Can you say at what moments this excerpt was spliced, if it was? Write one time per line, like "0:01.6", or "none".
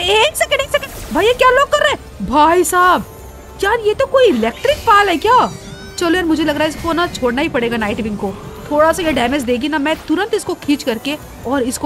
none